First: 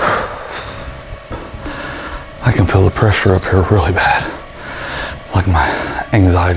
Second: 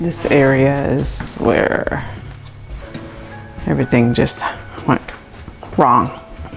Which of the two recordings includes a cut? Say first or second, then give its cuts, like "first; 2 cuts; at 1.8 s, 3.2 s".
first; 1 cut; at 1.3 s